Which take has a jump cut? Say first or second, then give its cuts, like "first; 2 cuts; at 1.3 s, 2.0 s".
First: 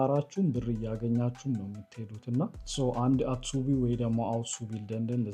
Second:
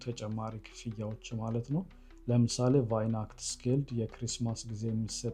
first; 1 cut; at 2.5 s